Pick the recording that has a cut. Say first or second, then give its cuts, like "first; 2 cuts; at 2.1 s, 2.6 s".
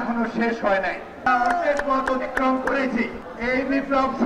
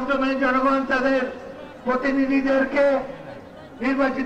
first; 2 cuts; at 1.2 s, 3.2 s